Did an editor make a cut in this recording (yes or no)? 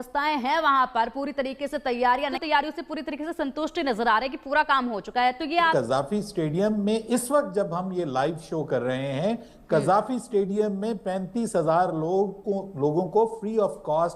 yes